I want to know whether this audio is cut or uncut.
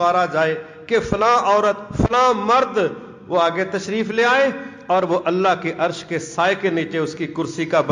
uncut